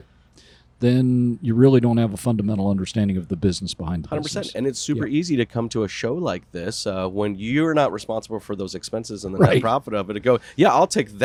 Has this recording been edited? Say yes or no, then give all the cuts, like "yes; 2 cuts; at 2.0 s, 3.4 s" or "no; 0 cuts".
no; 0 cuts